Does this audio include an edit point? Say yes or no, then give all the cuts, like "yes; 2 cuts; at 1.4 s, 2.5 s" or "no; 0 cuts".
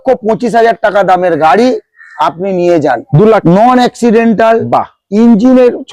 yes; 1 cut; at 3.4 s